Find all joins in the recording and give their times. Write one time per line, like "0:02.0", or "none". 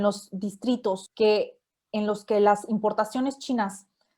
0:01.1